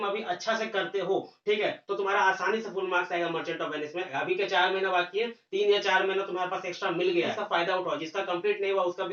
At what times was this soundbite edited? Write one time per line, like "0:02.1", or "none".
0:04.1
0:07.4